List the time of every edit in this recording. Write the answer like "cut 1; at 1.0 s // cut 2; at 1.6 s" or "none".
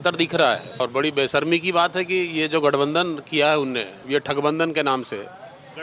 cut 1; at 0.8 s // cut 2; at 3.9 s